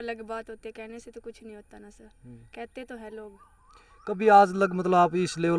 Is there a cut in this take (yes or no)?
no